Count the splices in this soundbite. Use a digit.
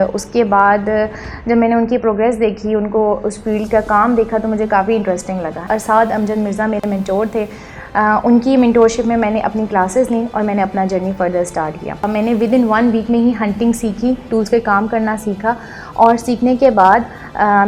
2